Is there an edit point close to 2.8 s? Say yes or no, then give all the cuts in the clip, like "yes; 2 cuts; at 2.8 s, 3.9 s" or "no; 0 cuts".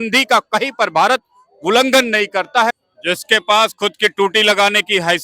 yes; 1 cut; at 2.8 s